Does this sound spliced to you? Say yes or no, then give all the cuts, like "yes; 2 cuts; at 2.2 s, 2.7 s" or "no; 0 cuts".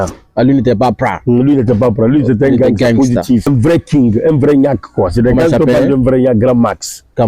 yes; 1 cut; at 3.5 s